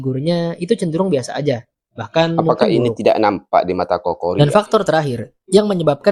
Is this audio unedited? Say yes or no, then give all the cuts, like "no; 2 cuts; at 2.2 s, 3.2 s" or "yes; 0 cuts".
yes; 0 cuts